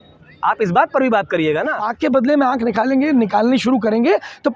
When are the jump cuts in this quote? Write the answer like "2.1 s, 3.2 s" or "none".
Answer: 1.8 s

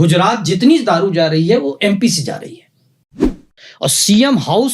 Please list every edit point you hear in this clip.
3.2 s

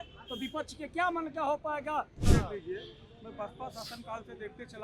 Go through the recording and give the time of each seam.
2.3 s

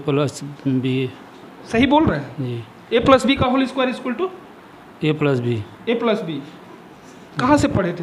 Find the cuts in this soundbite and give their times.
none

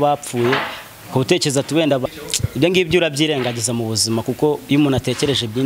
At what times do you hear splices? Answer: 2.0 s

